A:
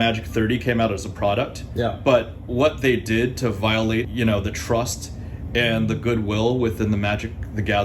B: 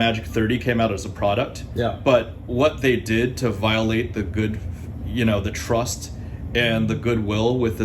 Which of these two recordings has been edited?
A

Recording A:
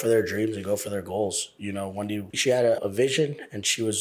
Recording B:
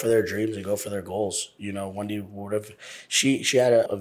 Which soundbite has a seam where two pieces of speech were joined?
A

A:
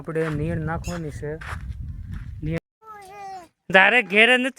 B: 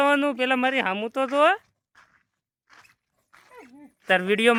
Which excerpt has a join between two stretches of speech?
A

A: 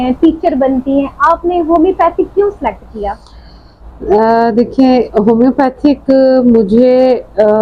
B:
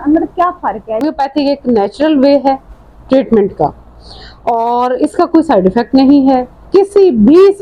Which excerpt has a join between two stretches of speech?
B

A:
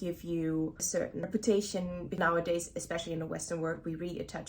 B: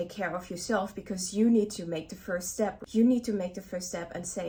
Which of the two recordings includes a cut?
A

